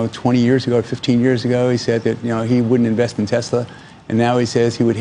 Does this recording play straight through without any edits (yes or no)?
yes